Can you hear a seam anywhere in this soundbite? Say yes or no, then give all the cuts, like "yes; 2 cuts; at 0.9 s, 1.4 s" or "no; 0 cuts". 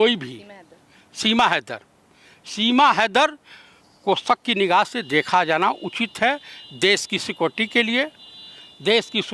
no; 0 cuts